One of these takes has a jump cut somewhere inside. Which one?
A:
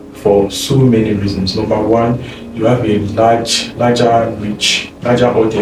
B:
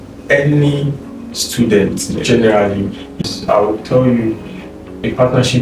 B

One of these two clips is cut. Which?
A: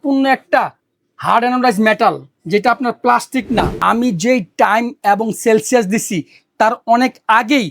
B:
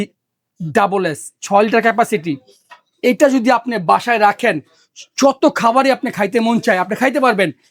A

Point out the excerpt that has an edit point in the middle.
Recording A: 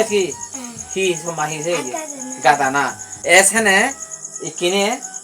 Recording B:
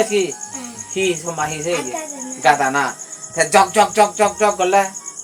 A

